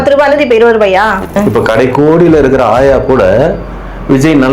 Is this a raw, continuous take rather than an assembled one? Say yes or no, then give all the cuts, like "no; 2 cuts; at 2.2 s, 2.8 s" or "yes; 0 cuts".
no; 1 cut; at 1.3 s